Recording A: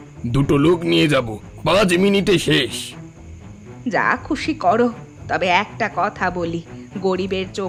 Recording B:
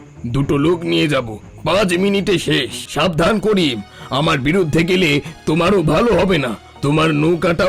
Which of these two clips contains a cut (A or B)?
B